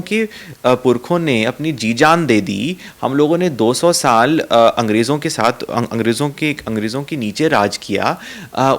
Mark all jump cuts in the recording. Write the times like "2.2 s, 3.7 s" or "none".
none